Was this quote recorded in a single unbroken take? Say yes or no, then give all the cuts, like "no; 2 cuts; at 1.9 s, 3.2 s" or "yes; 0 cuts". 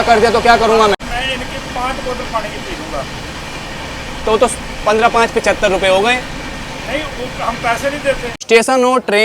no; 2 cuts; at 0.9 s, 8.3 s